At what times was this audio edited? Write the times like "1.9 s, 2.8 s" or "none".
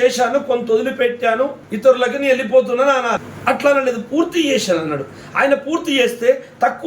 1.6 s, 3.3 s